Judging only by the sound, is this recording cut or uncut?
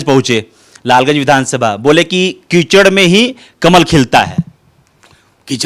uncut